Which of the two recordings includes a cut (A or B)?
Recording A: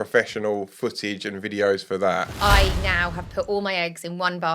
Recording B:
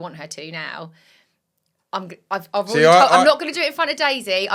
A